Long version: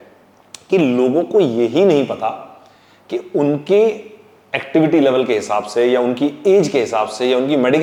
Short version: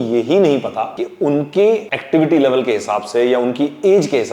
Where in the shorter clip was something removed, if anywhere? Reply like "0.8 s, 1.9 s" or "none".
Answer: 1.0 s, 1.9 s